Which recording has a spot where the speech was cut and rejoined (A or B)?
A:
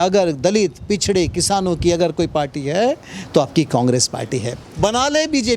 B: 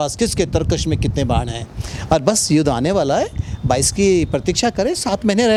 A